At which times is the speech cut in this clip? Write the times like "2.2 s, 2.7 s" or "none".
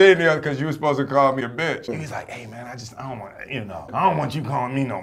1.4 s